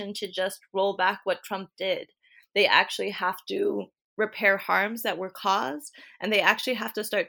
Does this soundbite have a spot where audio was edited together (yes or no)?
yes